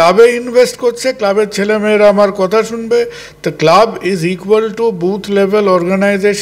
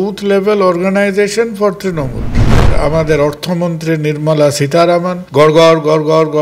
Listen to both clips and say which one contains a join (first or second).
second